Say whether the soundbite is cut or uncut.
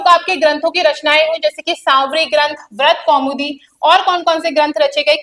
uncut